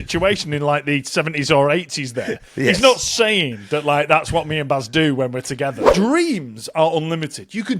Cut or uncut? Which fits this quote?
cut